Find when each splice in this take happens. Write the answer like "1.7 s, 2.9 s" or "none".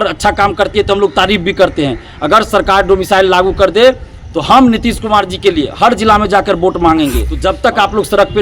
7.3 s